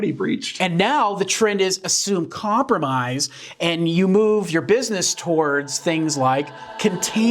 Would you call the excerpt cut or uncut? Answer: uncut